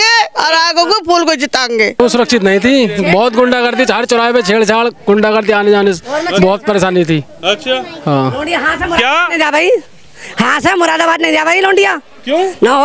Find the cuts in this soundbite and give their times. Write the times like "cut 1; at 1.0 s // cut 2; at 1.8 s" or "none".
cut 1; at 2.0 s